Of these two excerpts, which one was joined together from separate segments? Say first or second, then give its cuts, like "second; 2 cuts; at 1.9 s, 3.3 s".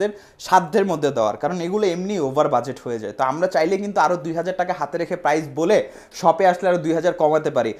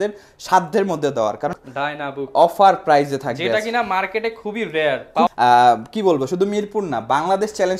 second; 2 cuts; at 1.6 s, 5.3 s